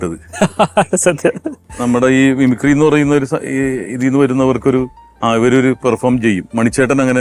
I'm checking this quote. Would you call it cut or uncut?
uncut